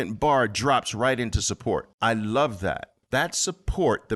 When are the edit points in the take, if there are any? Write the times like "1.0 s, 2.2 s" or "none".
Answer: 1.9 s, 2.9 s